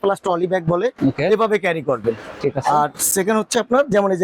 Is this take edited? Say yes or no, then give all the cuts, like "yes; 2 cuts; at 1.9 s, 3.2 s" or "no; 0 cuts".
no; 0 cuts